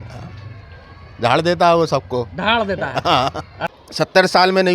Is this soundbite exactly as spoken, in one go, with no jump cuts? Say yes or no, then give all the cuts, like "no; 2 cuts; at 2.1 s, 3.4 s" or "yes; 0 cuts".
no; 1 cut; at 3.5 s